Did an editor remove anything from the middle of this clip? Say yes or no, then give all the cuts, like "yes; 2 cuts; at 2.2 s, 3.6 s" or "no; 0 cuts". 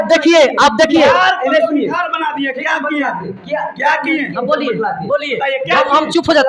no; 0 cuts